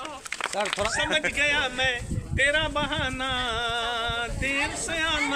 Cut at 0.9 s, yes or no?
yes